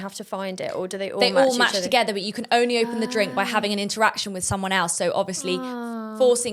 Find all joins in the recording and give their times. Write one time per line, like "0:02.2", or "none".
none